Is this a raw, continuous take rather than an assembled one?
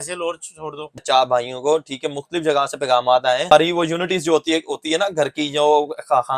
no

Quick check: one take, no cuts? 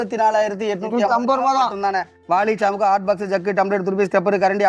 no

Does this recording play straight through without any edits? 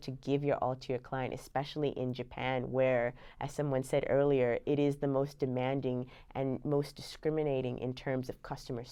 yes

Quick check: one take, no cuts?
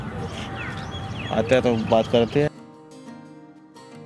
no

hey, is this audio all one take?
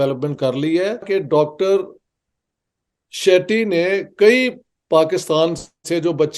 no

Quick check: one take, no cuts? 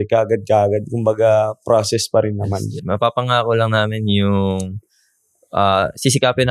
no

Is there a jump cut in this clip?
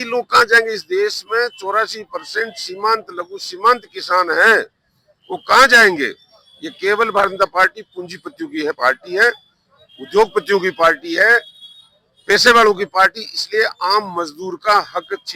no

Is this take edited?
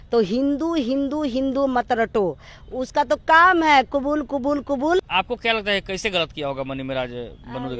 yes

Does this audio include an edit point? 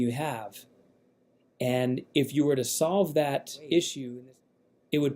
yes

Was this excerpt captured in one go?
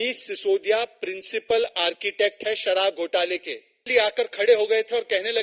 no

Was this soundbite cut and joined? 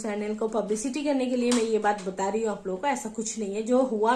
no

